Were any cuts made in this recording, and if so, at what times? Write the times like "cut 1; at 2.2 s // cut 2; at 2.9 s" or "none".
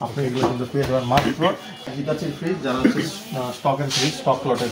cut 1; at 1.9 s